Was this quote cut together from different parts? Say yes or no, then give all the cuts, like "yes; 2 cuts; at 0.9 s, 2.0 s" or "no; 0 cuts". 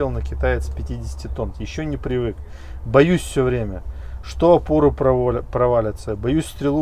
yes; 1 cut; at 1.5 s